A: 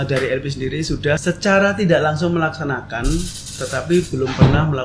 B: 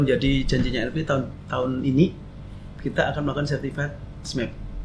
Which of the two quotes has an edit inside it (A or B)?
A